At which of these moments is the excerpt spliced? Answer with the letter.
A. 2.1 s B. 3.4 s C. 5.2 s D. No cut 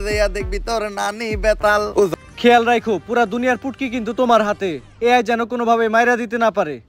A